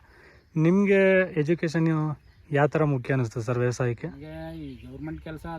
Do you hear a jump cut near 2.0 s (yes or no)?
no